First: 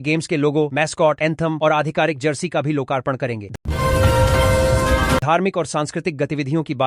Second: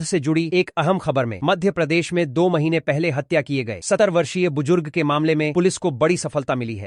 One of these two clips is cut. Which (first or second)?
first